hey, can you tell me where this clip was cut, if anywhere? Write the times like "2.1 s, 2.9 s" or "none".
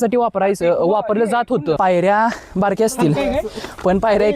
1.8 s